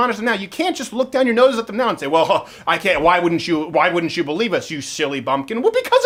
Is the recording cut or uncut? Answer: uncut